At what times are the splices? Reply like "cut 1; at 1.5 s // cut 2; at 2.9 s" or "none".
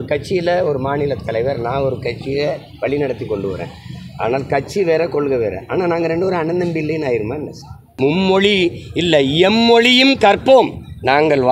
cut 1; at 7.9 s